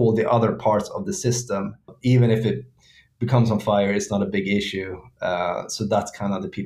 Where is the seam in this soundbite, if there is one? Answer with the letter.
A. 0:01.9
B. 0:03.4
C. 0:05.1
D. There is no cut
A